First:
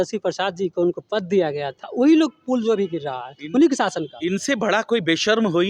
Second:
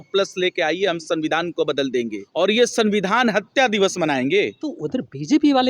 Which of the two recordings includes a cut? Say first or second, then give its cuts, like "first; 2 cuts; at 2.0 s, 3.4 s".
second; 2 cuts; at 2.2 s, 4.8 s